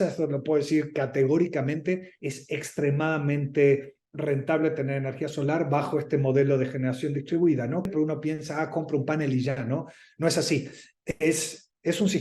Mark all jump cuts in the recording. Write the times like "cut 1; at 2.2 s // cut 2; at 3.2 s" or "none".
cut 1; at 7.9 s